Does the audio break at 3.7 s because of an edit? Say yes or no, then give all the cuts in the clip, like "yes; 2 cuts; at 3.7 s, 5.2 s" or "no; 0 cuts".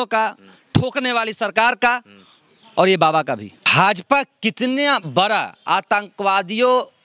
yes; 1 cut; at 3.7 s